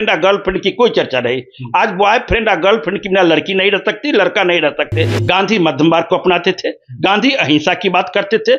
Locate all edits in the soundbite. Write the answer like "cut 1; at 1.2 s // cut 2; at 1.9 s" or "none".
cut 1; at 5.1 s